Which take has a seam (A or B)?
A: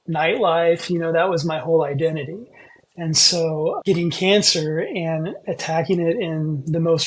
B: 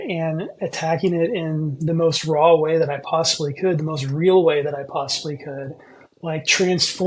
A